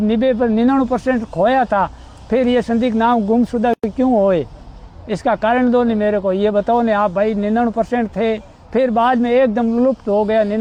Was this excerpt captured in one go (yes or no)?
yes